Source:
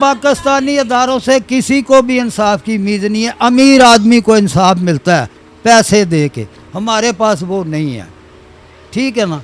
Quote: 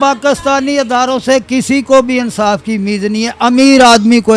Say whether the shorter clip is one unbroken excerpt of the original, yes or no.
yes